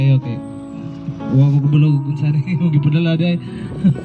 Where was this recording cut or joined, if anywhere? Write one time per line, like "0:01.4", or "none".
none

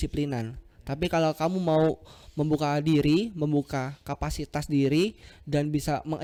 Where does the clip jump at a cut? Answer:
none

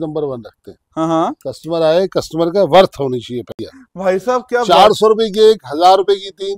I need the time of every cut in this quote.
0:03.7

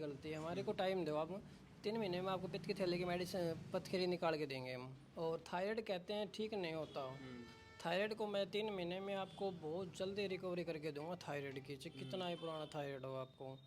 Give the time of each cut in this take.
0:05.0

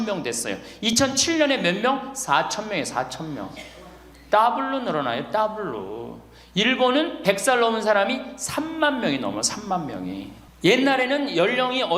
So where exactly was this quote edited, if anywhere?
0:10.4

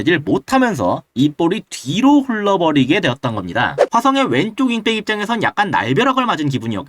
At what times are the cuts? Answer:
0:03.9

